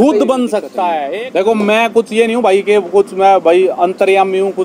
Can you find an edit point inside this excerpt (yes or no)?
yes